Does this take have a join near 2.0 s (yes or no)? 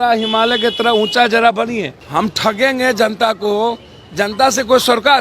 yes